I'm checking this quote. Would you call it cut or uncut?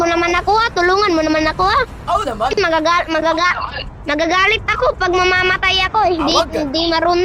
uncut